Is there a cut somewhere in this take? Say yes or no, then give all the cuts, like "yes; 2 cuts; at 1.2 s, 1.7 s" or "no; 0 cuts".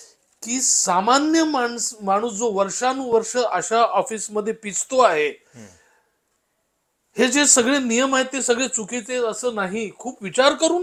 no; 0 cuts